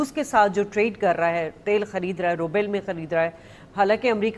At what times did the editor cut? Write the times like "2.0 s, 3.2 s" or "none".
none